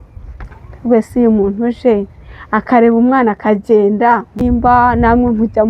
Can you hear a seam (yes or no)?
yes